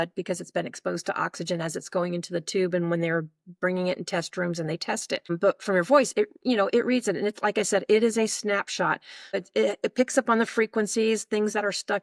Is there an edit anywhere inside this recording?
yes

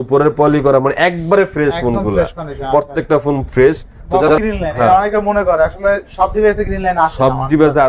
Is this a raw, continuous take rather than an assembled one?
no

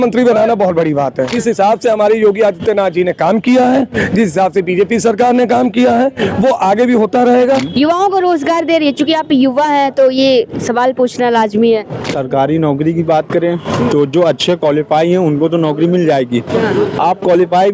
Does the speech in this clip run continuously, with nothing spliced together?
no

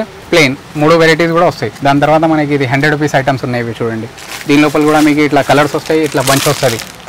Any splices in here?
no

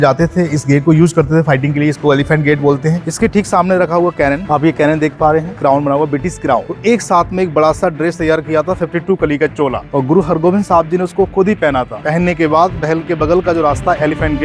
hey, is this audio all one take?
no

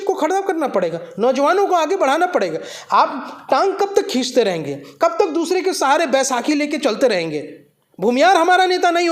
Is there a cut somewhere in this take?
no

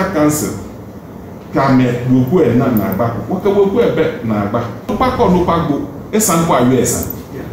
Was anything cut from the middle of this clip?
yes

